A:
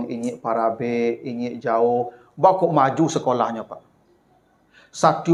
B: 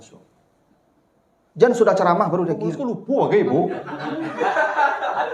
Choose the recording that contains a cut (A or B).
B